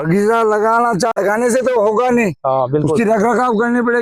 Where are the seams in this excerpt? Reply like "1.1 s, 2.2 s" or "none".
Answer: 1.1 s